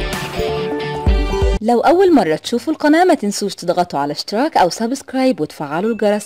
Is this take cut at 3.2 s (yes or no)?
no